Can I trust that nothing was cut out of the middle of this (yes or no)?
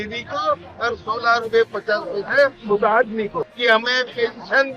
no